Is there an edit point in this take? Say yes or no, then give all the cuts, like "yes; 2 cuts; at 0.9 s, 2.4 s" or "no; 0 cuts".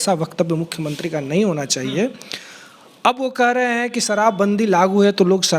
no; 0 cuts